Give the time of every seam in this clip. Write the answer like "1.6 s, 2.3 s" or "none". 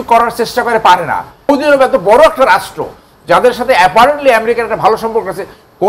1.5 s